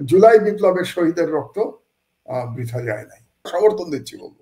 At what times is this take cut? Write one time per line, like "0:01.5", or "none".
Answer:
0:03.5

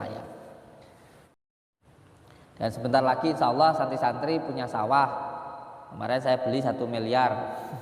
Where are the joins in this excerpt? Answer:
0:01.5

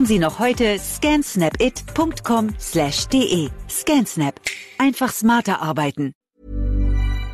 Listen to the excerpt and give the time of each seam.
0:06.2

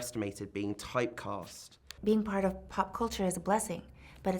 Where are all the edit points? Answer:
0:01.8

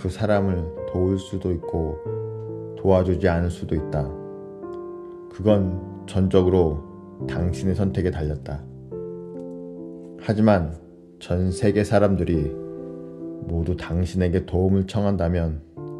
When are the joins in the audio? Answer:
0:04.1
0:05.4

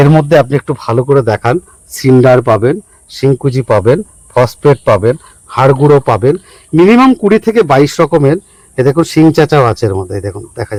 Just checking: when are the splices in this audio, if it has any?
none

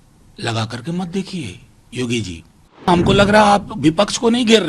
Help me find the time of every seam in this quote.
0:02.9

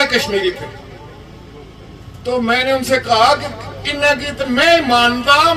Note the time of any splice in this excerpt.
none

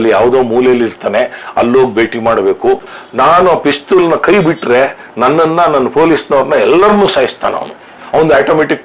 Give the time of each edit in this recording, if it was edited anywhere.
0:02.9

